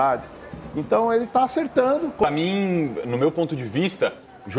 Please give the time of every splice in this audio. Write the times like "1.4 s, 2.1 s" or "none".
2.2 s